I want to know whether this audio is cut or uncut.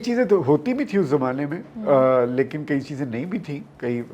uncut